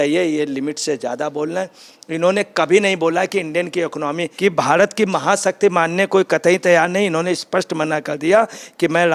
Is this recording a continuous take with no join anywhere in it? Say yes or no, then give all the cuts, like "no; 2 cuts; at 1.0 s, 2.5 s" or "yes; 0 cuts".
yes; 0 cuts